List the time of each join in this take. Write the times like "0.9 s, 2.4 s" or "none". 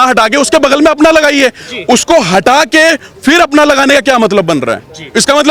none